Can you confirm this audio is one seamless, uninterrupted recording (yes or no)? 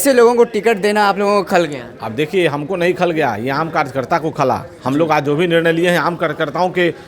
yes